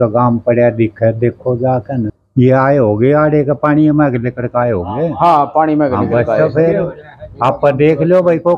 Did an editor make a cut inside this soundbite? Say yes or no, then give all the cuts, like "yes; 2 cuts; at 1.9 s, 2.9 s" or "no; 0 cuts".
yes; 1 cut; at 2.2 s